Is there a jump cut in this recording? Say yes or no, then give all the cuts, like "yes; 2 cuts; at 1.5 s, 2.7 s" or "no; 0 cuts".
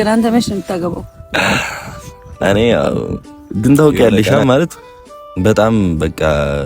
yes; 1 cut; at 3.3 s